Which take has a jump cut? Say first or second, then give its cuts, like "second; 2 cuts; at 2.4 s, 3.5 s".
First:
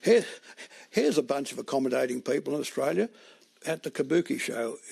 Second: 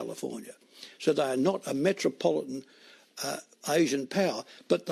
first; 1 cut; at 3.3 s